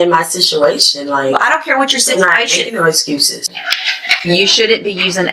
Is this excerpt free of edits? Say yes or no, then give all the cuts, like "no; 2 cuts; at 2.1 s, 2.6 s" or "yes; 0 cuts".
no; 1 cut; at 3.5 s